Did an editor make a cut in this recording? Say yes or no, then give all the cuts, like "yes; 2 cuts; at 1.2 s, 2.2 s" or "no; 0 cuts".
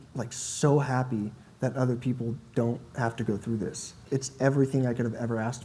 yes; 1 cut; at 3.9 s